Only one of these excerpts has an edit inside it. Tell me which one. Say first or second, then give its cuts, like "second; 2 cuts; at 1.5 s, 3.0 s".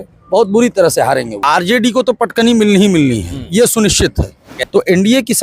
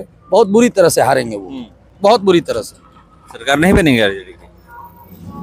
first; 2 cuts; at 1.4 s, 4.5 s